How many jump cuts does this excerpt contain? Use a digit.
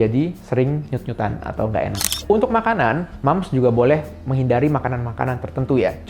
1